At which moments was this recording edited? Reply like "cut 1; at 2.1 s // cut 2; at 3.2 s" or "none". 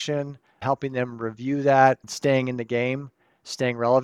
cut 1; at 2.1 s